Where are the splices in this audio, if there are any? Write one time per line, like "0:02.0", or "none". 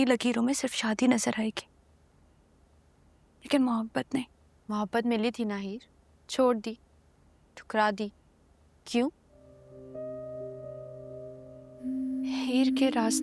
none